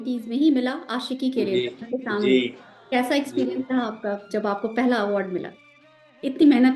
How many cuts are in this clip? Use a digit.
0